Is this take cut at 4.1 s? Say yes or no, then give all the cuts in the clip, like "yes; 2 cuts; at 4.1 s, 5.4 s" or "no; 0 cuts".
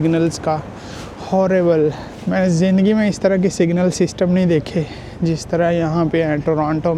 no; 1 cut; at 2.1 s